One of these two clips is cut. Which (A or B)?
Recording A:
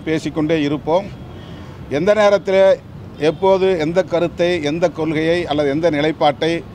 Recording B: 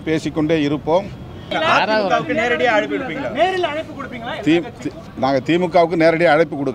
B